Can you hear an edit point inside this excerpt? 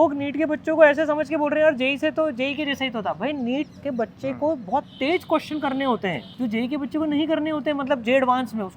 yes; 2 cuts; at 3.8 s, 6.3 s

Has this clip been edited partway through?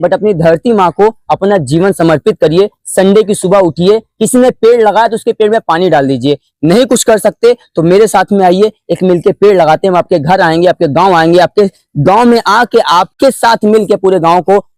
no; 0 cuts

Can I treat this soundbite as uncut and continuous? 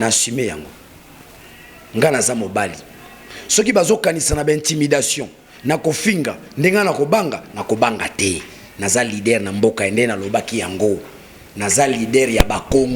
yes; 0 cuts

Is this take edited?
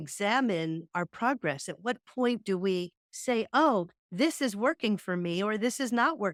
no; 0 cuts

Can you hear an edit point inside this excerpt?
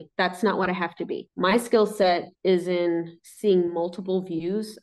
no; 0 cuts

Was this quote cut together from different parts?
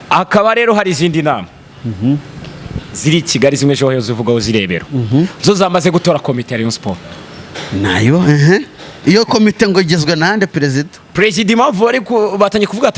no; 0 cuts

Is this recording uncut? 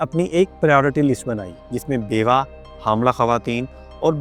yes; 0 cuts

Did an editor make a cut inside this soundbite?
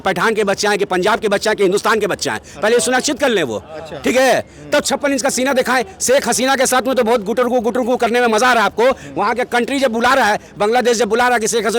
no; 0 cuts

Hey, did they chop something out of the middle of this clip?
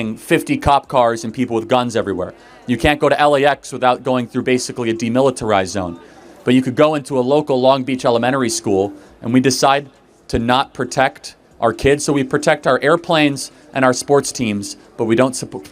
no; 0 cuts

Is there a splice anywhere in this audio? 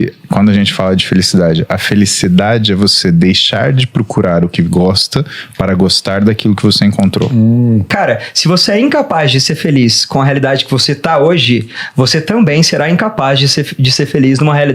yes; 1 cut; at 7.9 s

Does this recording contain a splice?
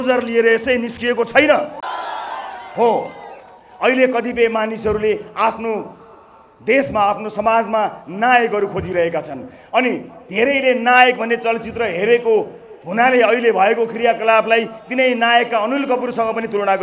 no; 0 cuts

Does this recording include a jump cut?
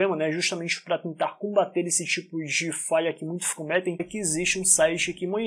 no; 0 cuts

